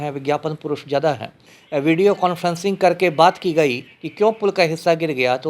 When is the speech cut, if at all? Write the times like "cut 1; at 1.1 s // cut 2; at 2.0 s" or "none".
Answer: cut 1; at 1.5 s